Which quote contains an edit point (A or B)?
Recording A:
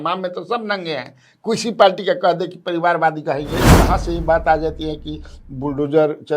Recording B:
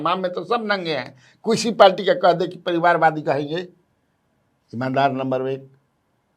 A